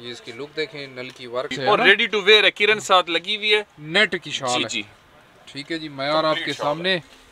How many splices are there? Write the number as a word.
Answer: one